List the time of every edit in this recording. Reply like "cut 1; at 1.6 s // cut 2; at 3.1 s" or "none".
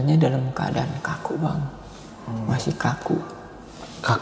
none